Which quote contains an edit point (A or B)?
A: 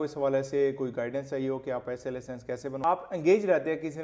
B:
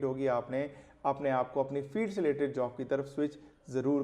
A